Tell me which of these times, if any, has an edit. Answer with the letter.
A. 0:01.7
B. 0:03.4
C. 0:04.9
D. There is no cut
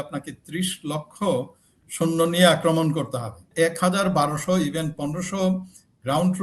B